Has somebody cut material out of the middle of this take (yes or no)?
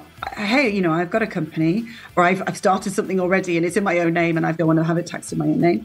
yes